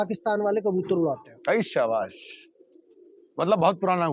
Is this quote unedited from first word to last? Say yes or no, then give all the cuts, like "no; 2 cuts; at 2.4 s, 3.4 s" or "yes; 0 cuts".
yes; 0 cuts